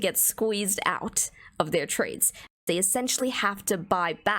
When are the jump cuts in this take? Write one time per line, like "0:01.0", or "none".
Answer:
0:02.5